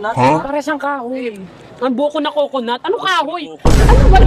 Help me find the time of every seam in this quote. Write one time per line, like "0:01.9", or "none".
none

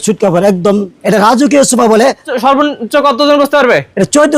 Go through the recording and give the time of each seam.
0:00.9
0:02.4

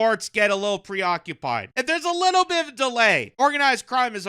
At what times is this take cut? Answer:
0:01.7
0:03.3

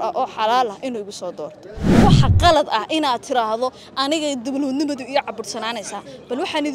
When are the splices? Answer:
0:02.0

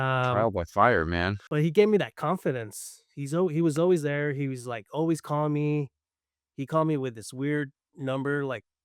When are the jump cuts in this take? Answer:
0:01.4

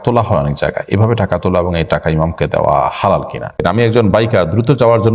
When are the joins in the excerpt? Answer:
0:03.5

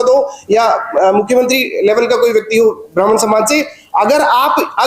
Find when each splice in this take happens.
none

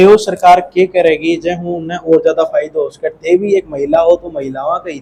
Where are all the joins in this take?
none

